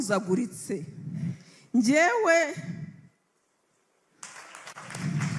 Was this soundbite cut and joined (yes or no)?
yes